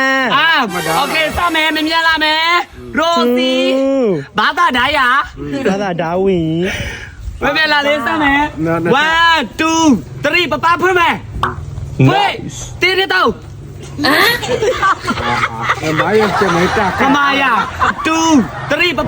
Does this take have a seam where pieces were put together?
yes; 1 cut; at 17.9 s

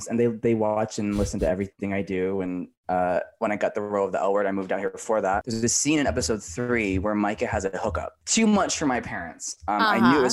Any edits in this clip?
yes; 2 cuts; at 5.5 s, 8.1 s

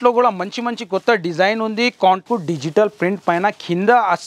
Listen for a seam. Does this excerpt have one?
yes; 1 cut; at 2.2 s

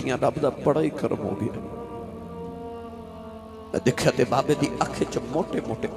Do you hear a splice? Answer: no; 0 cuts

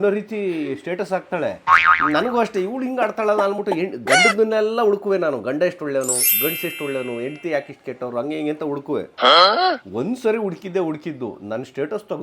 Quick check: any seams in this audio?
yes; 1 cut; at 2.0 s

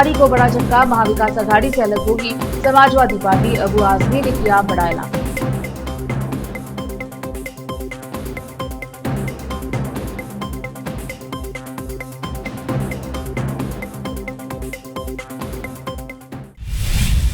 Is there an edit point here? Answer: yes; 1 cut; at 16.4 s

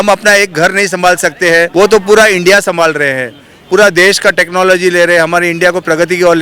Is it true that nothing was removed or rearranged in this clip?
no; 1 cut; at 1.7 s

